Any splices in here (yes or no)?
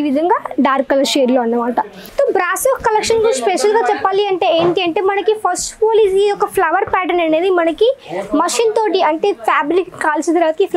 yes